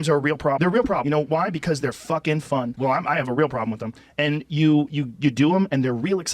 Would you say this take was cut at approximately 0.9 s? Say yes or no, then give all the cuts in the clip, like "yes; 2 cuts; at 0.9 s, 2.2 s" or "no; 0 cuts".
yes; 1 cut; at 0.9 s